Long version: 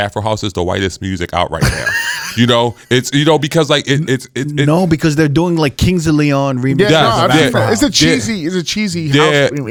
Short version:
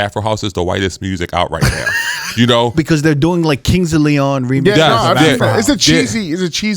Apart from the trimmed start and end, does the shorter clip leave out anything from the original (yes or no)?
yes